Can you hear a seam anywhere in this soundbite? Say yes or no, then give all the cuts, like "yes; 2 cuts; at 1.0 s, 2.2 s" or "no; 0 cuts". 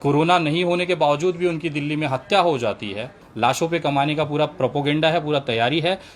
yes; 1 cut; at 3.2 s